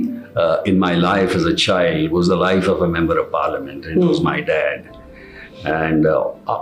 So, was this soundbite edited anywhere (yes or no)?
no